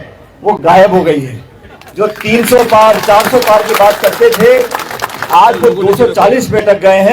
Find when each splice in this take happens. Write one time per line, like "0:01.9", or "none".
none